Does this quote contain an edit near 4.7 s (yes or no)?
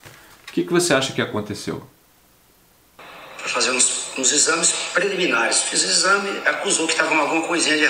no